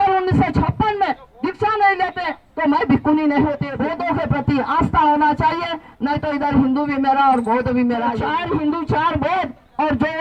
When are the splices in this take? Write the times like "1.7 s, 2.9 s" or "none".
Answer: 3.7 s, 8.2 s